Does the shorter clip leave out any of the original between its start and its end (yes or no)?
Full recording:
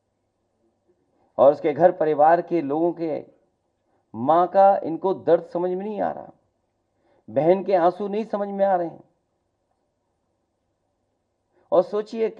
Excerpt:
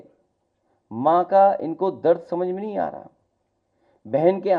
no